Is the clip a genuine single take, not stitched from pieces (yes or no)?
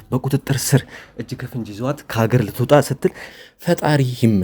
no